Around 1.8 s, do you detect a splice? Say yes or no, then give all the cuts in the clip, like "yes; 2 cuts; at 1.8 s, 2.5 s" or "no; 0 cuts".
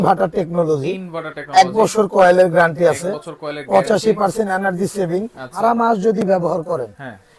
no; 1 cut; at 5.5 s